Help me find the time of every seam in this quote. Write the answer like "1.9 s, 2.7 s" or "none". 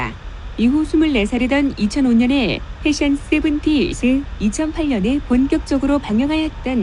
1.4 s